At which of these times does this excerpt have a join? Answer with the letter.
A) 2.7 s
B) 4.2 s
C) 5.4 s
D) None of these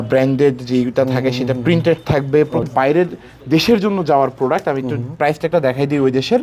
A